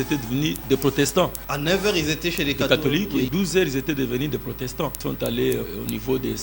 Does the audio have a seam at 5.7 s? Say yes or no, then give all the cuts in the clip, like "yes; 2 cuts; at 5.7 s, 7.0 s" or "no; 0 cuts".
yes; 4 cuts; at 1.5 s, 3.3 s, 5.0 s, 5.7 s